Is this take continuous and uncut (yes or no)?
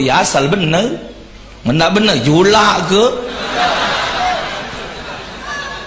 yes